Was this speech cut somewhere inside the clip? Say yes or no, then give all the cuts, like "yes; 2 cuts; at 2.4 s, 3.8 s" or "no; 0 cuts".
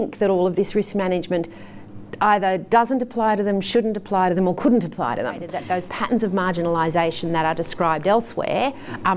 yes; 1 cut; at 5.6 s